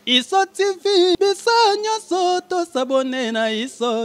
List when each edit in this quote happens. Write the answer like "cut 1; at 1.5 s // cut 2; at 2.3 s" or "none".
cut 1; at 1.2 s